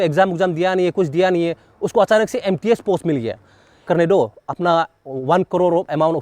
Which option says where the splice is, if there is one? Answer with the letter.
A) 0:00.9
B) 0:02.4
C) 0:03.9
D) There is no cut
C